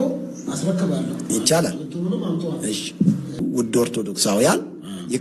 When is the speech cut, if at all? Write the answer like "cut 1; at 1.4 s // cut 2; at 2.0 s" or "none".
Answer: cut 1; at 3.3 s